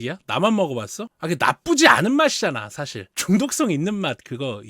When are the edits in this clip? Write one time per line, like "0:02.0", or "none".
0:03.1